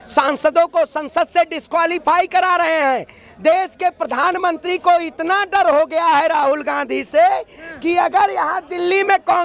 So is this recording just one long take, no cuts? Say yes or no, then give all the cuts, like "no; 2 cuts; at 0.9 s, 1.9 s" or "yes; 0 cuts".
yes; 0 cuts